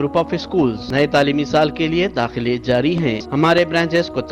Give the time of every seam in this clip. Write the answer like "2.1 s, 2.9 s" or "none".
0.8 s, 3.2 s